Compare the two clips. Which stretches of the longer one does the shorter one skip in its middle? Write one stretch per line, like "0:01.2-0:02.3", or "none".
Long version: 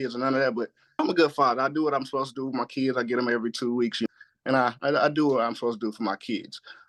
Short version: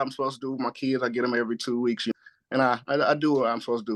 none